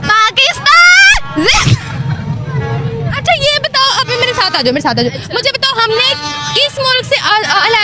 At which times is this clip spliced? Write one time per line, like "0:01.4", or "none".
none

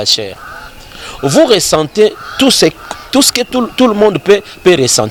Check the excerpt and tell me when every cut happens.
none

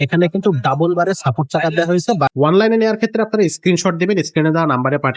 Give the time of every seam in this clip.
0:02.3

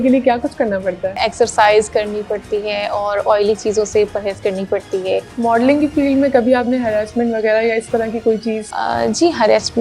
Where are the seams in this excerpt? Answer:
0:01.2
0:05.3
0:08.7

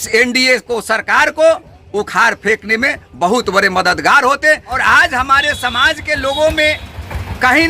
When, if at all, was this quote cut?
0:04.8

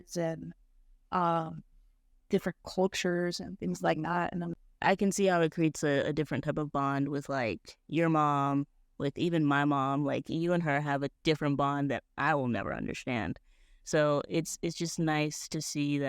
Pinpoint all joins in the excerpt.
0:04.5

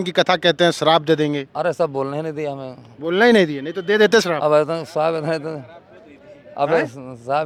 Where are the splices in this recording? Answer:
none

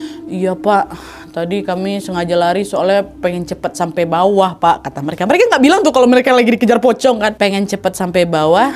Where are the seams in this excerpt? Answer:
0:07.3

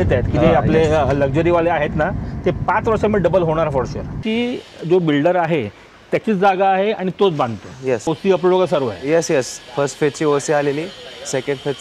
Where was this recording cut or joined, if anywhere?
0:04.2
0:08.1

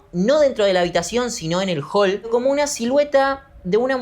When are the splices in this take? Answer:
0:02.3

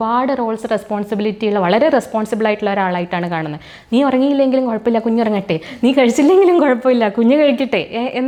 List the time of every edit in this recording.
none

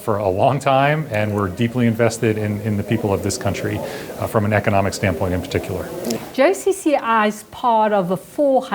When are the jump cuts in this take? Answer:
0:06.1

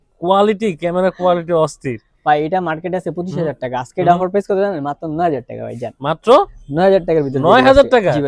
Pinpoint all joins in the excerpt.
none

